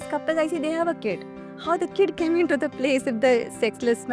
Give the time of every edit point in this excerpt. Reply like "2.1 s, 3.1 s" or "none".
none